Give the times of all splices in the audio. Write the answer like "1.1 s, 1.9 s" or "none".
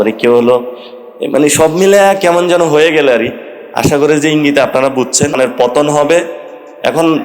5.4 s

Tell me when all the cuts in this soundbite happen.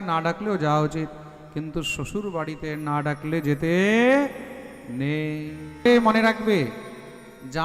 5.9 s

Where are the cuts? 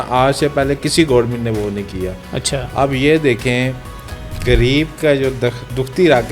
4.3 s

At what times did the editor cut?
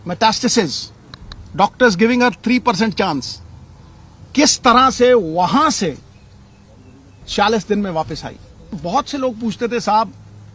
8.8 s

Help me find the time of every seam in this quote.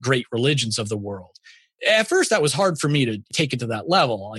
1.8 s, 3.3 s

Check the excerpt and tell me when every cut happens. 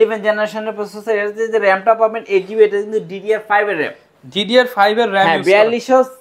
none

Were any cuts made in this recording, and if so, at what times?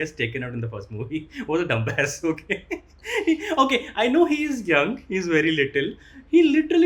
none

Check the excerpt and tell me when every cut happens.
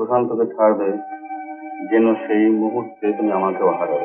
none

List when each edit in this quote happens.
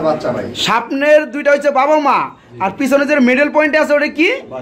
none

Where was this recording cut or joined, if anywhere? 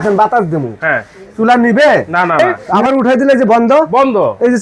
2.7 s

